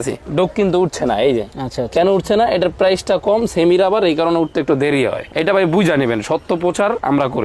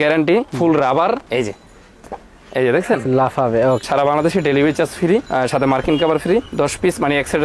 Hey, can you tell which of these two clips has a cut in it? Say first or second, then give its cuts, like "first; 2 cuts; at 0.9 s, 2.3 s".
second; 2 cuts; at 1.3 s, 3.8 s